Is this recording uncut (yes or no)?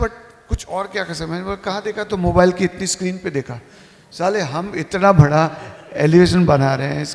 yes